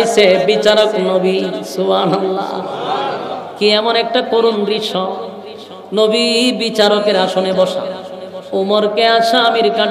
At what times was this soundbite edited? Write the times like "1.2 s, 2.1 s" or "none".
none